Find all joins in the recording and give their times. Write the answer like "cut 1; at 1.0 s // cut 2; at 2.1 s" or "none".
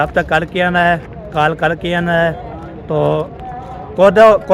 none